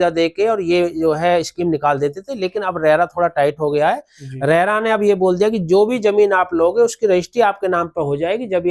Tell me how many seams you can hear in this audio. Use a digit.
0